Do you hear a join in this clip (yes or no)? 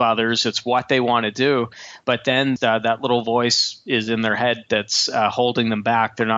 yes